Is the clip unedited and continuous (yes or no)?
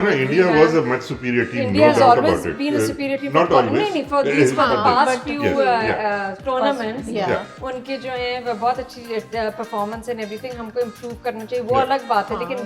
yes